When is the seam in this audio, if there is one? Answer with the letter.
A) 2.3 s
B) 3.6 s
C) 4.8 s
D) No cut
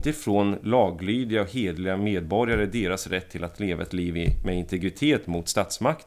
D